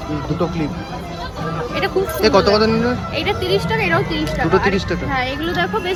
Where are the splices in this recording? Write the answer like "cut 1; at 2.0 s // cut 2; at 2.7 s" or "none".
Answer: none